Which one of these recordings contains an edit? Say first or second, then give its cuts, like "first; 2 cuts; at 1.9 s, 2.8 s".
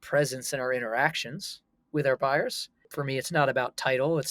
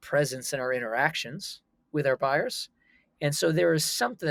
first; 1 cut; at 2.9 s